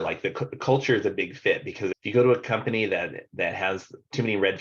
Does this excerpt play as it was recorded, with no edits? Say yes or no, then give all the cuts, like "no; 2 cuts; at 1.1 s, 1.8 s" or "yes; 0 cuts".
no; 1 cut; at 2.0 s